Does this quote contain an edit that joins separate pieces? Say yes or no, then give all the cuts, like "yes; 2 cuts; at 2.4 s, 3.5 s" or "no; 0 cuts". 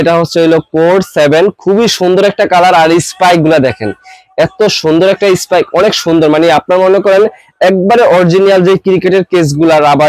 no; 0 cuts